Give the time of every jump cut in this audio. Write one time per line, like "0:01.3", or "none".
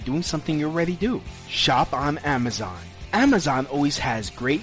none